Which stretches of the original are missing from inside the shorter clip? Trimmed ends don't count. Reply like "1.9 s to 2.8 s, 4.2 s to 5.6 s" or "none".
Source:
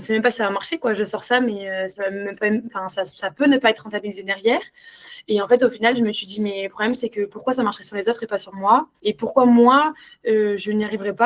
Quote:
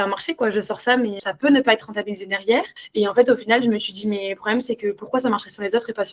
1.6 s to 3.2 s, 4.8 s to 5.1 s